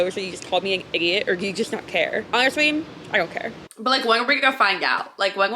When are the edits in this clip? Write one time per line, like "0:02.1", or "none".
0:02.3
0:03.6